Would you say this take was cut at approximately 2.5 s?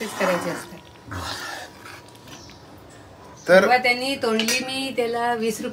no; 0 cuts

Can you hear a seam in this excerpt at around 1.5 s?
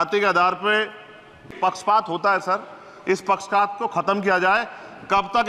yes; 1 cut; at 1.5 s

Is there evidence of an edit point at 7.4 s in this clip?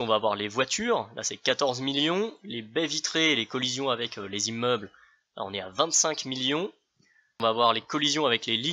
yes; 1 cut; at 7.4 s

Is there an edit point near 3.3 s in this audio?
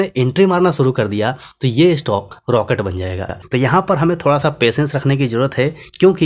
yes; 1 cut; at 3.3 s

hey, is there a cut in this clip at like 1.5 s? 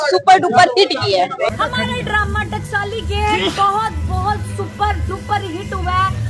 yes; 1 cut; at 1.5 s

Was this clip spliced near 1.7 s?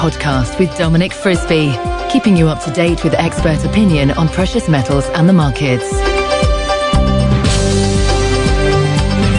no; 0 cuts

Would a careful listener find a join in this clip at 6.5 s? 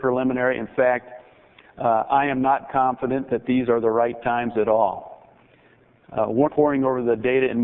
no; 0 cuts

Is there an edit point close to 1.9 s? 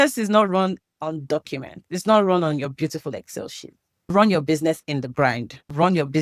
yes; 3 cuts; at 1.9 s, 2.7 s, 4.9 s

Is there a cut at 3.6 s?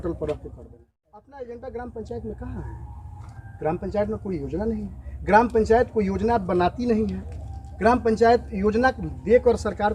no; 1 cut; at 1.2 s

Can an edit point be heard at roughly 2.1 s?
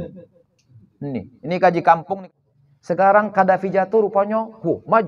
yes; 1 cut; at 2.1 s

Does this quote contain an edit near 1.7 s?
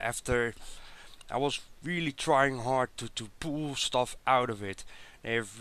no; 1 cut; at 3.6 s

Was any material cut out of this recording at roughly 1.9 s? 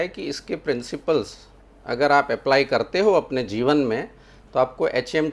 no; 0 cuts

